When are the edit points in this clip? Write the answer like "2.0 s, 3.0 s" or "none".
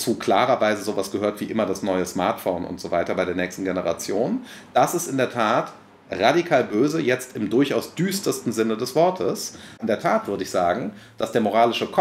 9.8 s